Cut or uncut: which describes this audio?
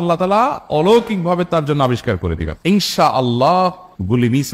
cut